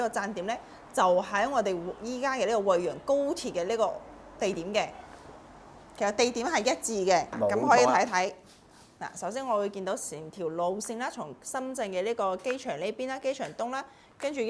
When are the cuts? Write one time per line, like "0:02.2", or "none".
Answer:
0:07.3

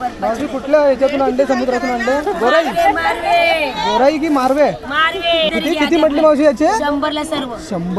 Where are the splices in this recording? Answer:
0:05.5

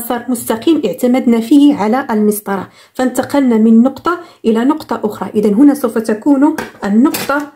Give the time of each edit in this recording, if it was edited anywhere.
none

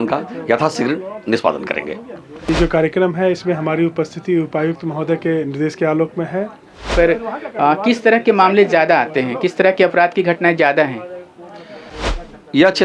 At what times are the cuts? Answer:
0:02.5
0:06.9

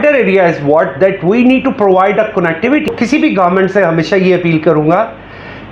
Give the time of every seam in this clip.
0:02.9

